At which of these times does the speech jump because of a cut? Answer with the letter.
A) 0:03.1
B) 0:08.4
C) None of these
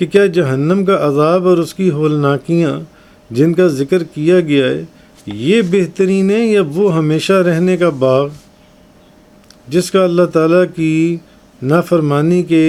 C